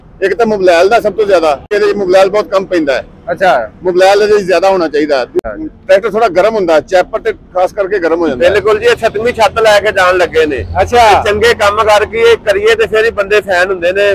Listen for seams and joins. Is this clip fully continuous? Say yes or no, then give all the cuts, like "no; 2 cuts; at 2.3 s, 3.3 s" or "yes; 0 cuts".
no; 3 cuts; at 1.7 s, 5.4 s, 8.3 s